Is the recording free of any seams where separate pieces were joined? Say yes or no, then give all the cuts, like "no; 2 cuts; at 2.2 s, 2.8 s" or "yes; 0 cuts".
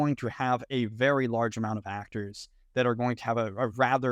yes; 0 cuts